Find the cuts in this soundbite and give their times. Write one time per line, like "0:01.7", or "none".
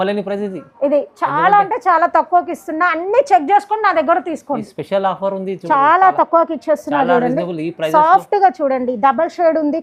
0:05.6